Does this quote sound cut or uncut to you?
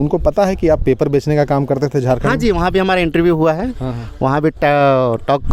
uncut